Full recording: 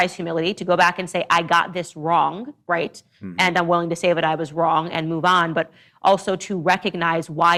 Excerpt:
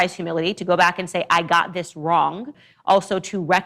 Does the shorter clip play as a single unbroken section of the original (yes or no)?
no